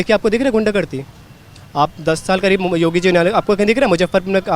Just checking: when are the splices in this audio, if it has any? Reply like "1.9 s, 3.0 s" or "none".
none